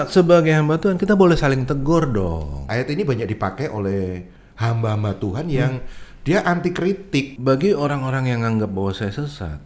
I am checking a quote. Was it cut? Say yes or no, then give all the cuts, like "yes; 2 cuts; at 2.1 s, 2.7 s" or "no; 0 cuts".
yes; 2 cuts; at 2.7 s, 7.3 s